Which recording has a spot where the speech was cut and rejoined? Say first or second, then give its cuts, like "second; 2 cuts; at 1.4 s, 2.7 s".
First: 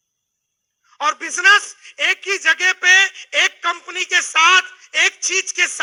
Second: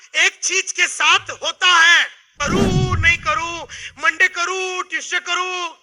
second; 1 cut; at 2.3 s